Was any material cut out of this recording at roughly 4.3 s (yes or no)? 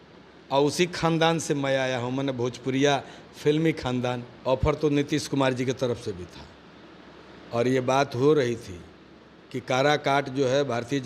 yes